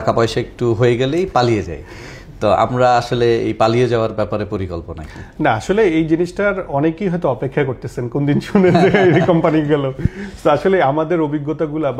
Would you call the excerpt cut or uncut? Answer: uncut